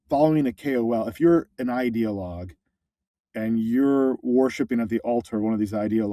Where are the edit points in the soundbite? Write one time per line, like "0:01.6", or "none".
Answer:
none